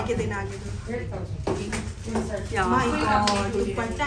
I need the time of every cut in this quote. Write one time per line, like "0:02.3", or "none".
none